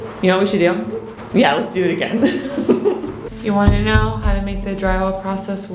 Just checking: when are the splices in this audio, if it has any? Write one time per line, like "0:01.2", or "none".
0:01.2
0:03.2

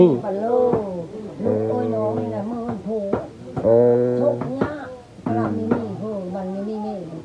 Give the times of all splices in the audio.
none

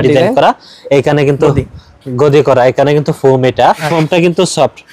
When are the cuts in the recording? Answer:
0:03.9

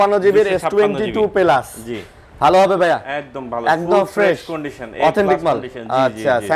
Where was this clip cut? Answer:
none

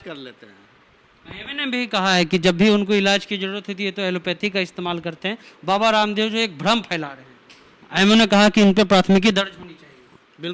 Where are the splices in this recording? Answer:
none

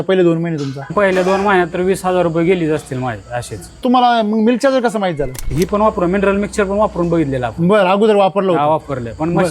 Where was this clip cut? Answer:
0:00.9
0:03.8
0:05.4

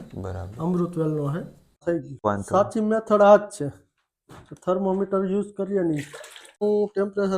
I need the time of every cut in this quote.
0:01.8
0:06.6

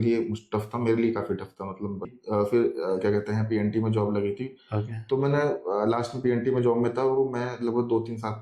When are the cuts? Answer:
0:02.2

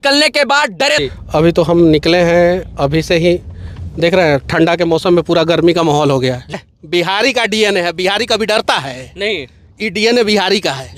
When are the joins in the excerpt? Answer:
0:01.0
0:06.5

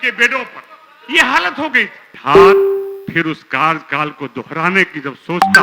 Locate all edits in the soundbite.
0:02.1

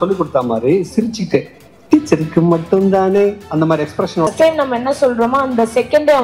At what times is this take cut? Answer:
0:04.3

